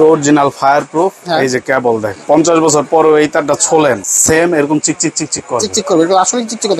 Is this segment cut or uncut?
cut